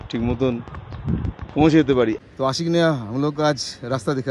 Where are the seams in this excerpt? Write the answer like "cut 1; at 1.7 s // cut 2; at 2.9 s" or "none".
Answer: cut 1; at 2.2 s